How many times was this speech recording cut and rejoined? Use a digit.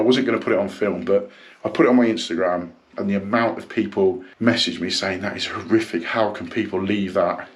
1